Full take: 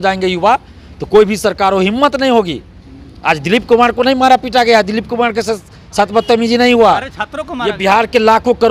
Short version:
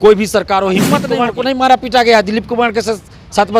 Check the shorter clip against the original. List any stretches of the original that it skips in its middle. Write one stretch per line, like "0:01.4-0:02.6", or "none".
0:02.2-0:03.7